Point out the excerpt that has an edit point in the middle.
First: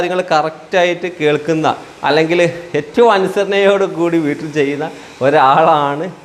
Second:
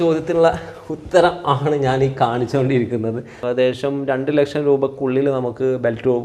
second; 1 cut; at 3.4 s

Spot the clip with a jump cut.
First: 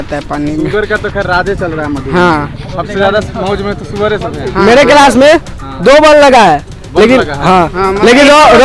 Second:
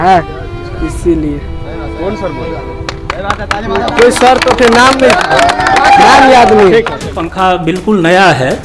second; 1 cut; at 7.2 s

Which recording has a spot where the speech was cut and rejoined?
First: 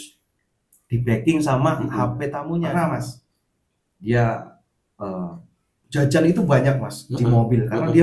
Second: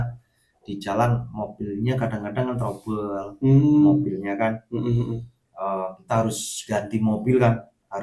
first; 1 cut; at 2.4 s

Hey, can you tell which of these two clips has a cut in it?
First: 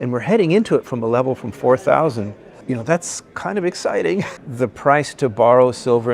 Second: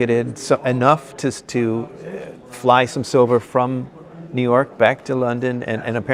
first; 2 cuts; at 2.5 s, 4.4 s

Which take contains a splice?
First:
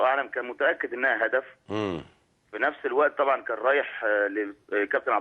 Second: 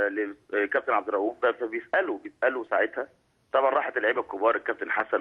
first; 1 cut; at 1.7 s

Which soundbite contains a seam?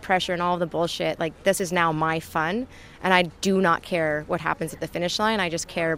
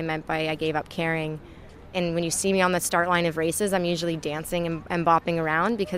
second; 1 cut; at 1.9 s

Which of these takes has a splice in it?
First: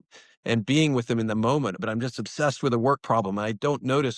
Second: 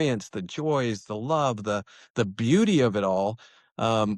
first; 1 cut; at 1.8 s

